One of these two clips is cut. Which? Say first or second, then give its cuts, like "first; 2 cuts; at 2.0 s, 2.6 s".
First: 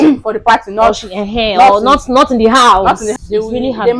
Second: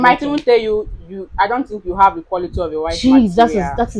first; 1 cut; at 3.1 s